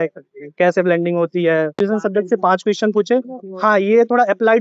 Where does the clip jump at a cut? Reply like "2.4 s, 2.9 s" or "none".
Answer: 1.8 s